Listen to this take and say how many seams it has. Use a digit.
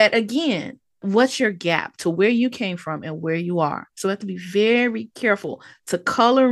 1